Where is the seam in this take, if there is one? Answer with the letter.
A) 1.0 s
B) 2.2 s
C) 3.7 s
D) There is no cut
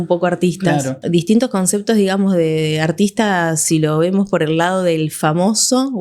A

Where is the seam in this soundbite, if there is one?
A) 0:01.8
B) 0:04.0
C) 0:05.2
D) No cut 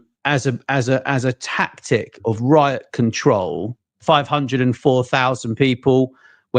B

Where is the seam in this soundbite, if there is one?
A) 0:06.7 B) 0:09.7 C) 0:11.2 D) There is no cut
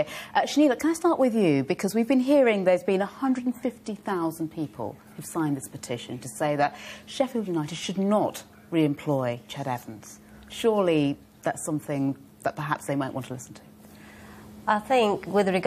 D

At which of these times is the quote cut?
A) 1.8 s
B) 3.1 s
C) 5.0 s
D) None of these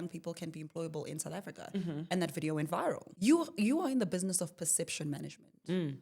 B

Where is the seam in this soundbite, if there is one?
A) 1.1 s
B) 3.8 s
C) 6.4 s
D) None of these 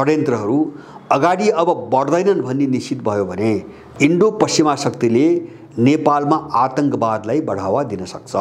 B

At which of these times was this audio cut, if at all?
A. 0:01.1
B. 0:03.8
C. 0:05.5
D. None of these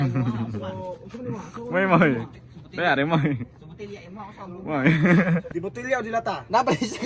C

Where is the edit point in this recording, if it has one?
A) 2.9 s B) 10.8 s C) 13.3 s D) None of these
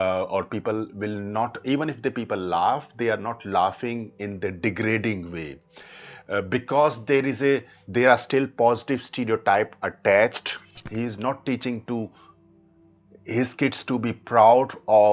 B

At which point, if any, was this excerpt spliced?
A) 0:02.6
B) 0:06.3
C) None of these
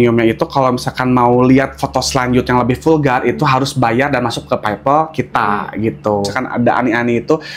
B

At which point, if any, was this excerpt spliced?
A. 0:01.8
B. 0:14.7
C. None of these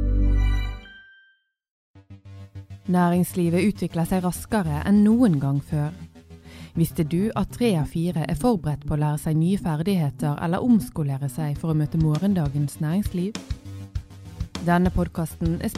A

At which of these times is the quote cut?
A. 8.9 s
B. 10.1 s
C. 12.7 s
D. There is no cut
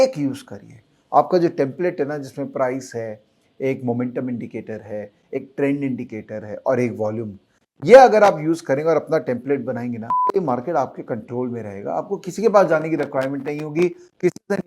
B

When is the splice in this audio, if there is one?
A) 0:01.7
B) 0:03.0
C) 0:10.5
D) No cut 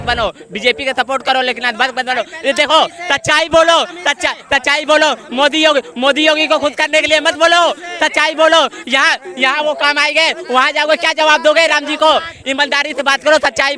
D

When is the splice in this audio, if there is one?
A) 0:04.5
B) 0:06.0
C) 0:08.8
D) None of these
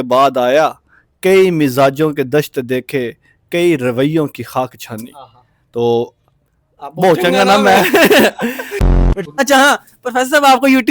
C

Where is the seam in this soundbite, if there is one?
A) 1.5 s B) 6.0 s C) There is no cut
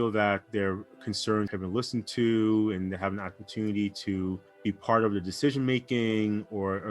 A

